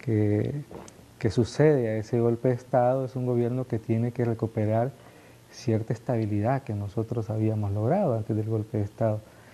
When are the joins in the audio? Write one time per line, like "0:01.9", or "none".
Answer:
0:02.4